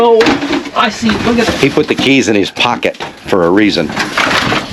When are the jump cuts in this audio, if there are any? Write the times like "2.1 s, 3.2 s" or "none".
none